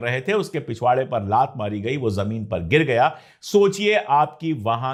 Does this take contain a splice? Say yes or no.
no